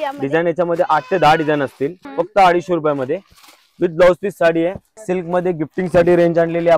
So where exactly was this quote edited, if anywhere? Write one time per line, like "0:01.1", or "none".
0:02.0
0:04.9